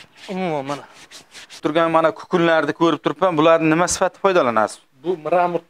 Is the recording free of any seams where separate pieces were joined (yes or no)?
no